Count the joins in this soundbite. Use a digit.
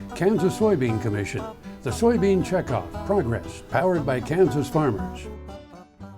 1